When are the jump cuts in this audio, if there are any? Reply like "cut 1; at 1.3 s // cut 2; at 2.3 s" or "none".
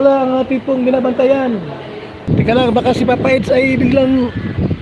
cut 1; at 2.2 s